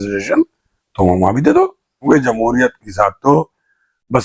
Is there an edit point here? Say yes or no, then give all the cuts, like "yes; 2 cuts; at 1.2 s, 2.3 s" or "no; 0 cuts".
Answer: yes; 1 cut; at 2.0 s